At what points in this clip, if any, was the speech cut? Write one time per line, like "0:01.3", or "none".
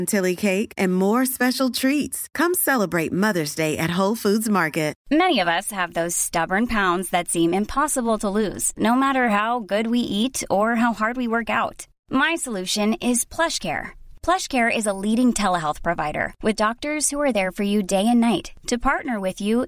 0:05.0